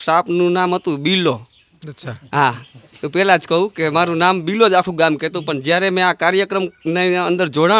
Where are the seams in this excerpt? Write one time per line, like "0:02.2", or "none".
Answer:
none